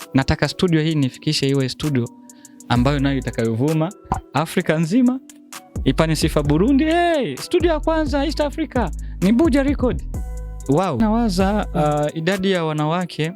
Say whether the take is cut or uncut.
cut